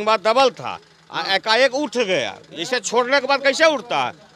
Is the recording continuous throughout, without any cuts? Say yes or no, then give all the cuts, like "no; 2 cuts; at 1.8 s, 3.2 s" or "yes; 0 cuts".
yes; 0 cuts